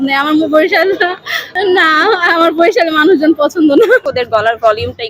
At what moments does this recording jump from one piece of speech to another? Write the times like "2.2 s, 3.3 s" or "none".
1.5 s, 4.0 s

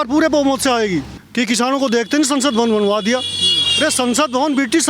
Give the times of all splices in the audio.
1.2 s

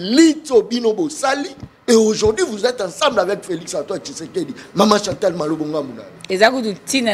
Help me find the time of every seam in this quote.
6.2 s

